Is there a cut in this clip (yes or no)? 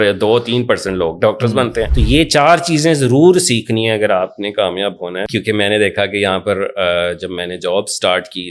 yes